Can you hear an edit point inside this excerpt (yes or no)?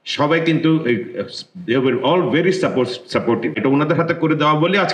yes